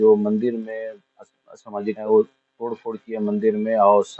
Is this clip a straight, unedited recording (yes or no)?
no